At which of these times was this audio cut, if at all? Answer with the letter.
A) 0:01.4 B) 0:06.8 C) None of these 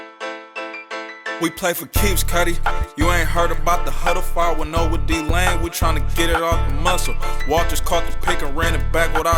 A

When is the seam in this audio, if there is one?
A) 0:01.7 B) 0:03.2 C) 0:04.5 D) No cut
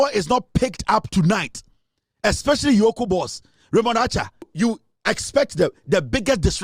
C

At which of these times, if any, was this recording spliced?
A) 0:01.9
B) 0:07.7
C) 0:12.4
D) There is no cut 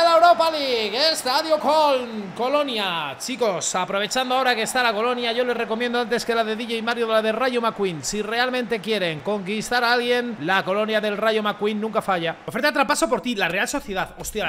C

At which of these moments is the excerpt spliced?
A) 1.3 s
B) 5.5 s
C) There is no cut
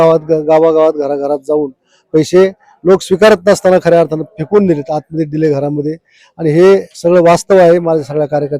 C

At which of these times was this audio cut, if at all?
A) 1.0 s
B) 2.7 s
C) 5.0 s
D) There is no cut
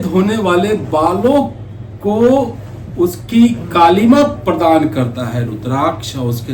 D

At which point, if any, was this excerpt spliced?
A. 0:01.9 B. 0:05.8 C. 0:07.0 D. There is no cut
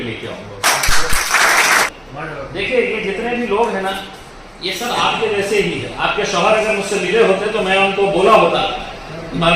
A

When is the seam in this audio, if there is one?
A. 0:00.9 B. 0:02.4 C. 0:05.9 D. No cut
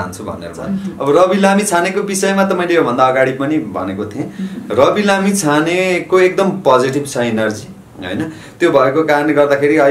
A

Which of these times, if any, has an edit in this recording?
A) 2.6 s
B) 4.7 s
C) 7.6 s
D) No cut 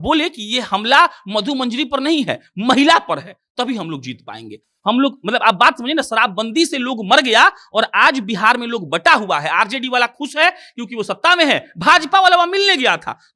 D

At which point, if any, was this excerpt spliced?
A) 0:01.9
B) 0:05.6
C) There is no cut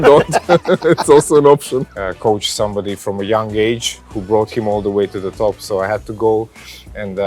A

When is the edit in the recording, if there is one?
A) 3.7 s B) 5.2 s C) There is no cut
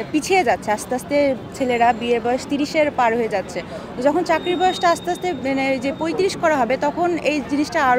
C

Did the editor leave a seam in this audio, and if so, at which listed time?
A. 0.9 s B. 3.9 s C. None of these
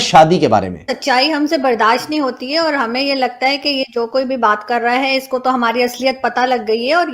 A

